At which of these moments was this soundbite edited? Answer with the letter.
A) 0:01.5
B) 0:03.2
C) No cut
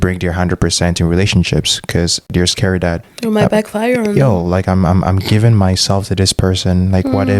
C